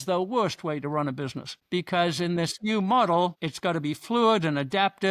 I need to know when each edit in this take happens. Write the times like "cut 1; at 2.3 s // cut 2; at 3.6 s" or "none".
cut 1; at 1.5 s // cut 2; at 3.5 s